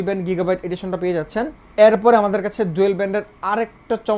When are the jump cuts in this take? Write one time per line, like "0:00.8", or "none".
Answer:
none